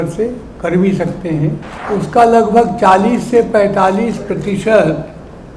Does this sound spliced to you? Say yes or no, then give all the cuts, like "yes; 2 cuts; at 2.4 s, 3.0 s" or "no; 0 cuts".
yes; 1 cut; at 1.7 s